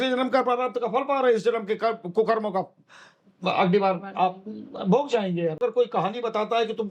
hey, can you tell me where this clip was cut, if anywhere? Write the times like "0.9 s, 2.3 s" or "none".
5.6 s

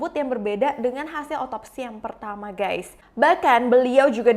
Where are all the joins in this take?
3.0 s

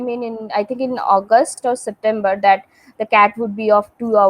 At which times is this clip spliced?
1.6 s

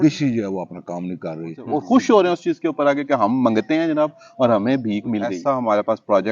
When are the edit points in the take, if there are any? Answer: 1.6 s, 5.4 s

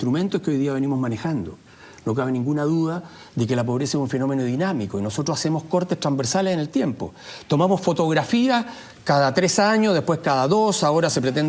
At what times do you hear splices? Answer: none

